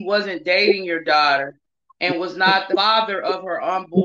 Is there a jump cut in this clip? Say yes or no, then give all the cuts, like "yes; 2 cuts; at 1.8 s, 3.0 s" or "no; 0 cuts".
yes; 1 cut; at 2.8 s